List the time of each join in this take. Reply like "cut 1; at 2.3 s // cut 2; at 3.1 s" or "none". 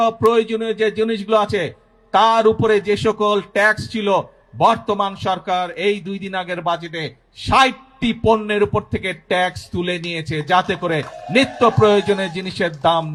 none